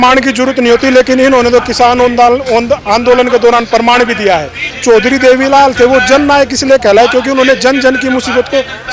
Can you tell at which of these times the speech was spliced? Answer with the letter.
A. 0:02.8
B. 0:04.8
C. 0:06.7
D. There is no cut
B